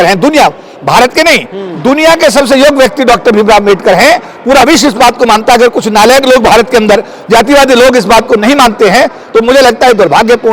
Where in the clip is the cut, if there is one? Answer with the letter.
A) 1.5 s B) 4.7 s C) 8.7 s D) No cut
D